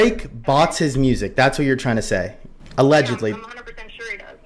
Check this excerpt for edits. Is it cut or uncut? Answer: uncut